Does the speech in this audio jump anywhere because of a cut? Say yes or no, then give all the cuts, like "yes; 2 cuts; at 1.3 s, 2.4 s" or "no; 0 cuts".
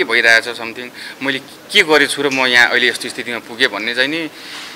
no; 0 cuts